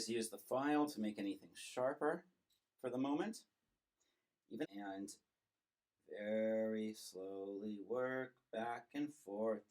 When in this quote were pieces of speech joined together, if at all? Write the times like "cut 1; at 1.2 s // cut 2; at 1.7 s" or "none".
cut 1; at 4.7 s